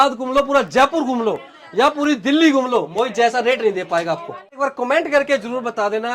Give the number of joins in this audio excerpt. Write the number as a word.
one